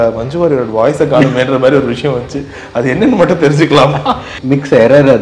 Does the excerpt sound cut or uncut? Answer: cut